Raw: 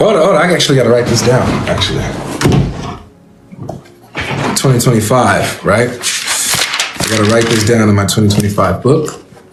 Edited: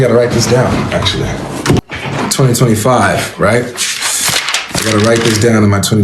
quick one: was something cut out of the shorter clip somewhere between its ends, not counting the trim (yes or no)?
yes